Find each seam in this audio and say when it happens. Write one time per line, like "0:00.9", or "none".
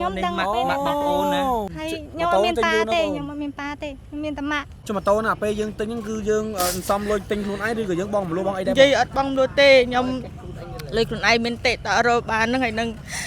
0:01.8
0:04.8